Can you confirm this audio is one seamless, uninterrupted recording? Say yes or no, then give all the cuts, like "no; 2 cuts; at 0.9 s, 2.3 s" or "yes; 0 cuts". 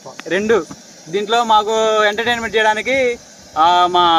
yes; 0 cuts